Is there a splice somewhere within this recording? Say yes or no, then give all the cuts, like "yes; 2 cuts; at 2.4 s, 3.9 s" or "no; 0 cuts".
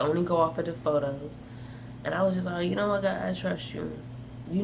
no; 0 cuts